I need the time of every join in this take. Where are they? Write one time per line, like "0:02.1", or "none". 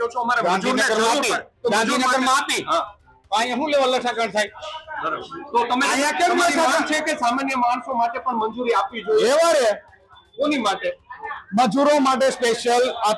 none